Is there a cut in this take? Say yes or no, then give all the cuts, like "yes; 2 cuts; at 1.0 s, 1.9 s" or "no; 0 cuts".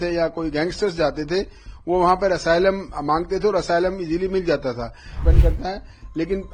yes; 1 cut; at 5.2 s